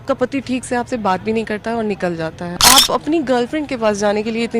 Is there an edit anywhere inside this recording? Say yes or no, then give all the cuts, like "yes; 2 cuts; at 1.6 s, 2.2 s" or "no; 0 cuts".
yes; 1 cut; at 2.5 s